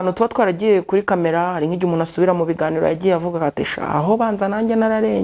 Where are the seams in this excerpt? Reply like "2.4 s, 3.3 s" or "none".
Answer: none